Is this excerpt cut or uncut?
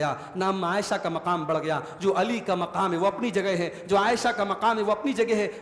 uncut